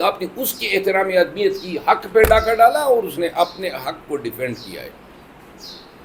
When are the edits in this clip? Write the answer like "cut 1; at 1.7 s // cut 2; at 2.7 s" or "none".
none